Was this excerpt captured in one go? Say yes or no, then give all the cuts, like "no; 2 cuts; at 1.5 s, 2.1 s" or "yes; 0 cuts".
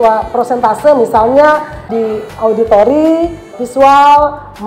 no; 2 cuts; at 1.9 s, 3.6 s